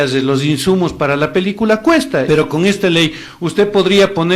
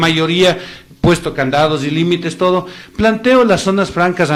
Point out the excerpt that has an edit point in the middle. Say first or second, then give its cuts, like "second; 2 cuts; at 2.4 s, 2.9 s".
first; 1 cut; at 2.2 s